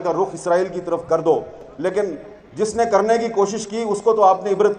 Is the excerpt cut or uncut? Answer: uncut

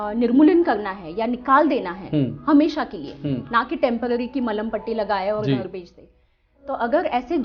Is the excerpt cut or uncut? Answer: uncut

